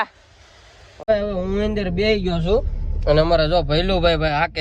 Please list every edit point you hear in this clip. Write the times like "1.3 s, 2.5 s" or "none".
1.0 s